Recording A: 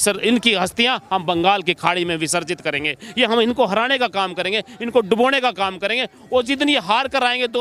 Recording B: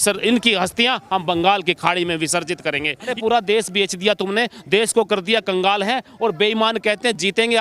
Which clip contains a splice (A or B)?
B